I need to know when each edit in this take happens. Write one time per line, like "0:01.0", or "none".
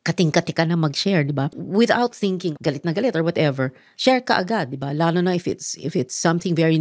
0:01.5
0:02.5